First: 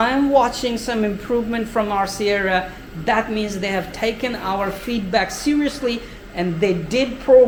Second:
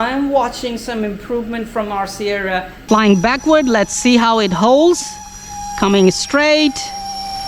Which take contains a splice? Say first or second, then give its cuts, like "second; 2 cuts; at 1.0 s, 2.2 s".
second; 1 cut; at 2.7 s